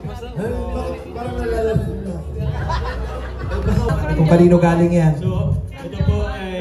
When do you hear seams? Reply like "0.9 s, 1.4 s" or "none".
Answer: 3.9 s